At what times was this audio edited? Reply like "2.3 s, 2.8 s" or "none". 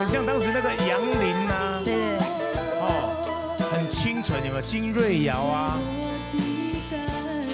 none